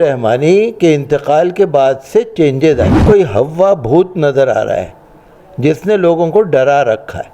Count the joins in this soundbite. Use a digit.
1